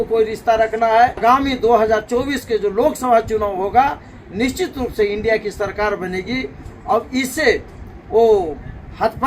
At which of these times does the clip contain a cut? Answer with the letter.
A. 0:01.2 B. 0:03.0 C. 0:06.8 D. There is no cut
A